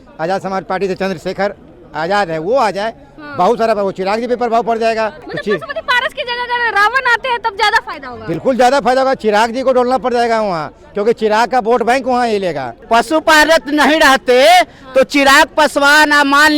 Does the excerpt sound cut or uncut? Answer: cut